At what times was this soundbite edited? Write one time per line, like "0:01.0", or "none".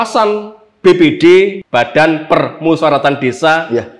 0:01.6